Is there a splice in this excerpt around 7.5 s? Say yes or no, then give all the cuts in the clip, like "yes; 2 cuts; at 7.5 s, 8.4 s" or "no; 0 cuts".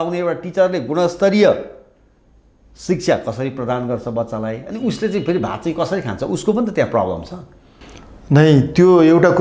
no; 0 cuts